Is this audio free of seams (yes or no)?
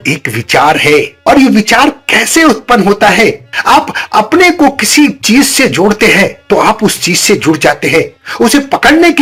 yes